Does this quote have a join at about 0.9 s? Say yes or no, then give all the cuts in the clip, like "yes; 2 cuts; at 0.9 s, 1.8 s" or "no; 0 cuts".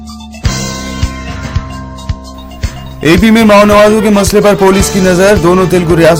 no; 1 cut; at 2.3 s